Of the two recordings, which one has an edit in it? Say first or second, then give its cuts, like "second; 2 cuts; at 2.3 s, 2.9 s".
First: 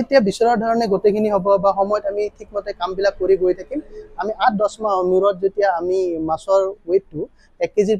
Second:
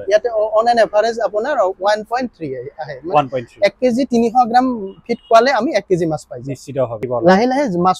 second; 1 cut; at 7.0 s